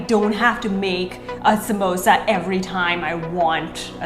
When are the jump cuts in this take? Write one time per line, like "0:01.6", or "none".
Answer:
none